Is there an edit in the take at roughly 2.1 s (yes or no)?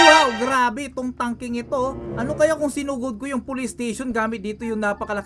yes